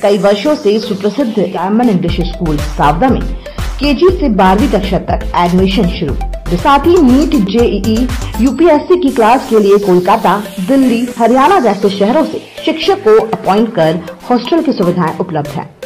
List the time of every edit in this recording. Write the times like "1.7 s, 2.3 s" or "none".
1.6 s, 6.6 s